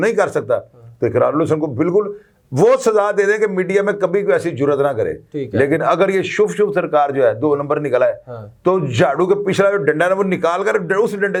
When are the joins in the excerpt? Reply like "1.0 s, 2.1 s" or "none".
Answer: none